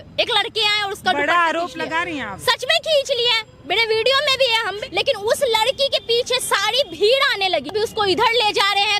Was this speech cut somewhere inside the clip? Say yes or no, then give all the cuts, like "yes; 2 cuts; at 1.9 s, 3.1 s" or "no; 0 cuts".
yes; 2 cuts; at 4.8 s, 7.7 s